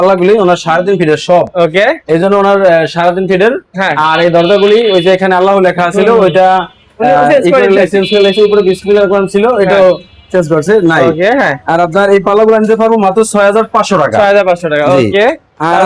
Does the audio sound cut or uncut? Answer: uncut